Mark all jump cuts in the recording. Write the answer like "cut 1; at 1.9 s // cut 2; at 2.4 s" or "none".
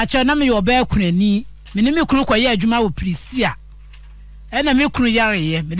cut 1; at 1.6 s